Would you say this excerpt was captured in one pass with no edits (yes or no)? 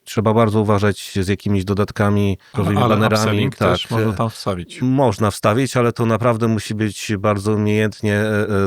no